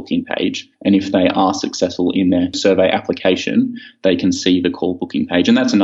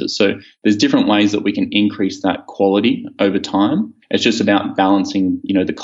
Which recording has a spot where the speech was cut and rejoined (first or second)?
first